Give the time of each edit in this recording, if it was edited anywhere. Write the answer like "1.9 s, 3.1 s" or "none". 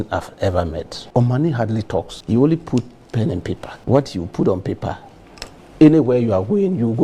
0.9 s, 2.2 s, 3.7 s